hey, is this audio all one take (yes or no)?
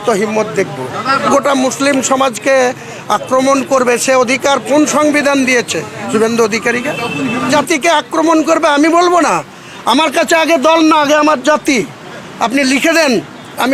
no